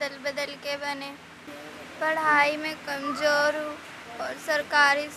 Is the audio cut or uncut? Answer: cut